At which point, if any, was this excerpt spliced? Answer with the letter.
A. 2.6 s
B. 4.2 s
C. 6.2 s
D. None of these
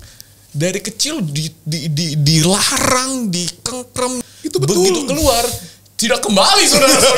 B